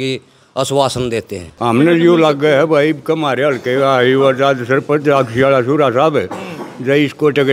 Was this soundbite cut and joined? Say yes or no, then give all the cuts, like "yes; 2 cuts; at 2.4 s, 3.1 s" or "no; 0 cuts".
yes; 1 cut; at 1.5 s